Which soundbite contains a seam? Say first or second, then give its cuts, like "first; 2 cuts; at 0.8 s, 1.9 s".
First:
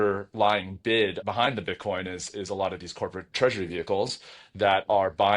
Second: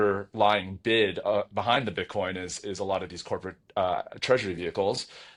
first; 2 cuts; at 1.2 s, 3.3 s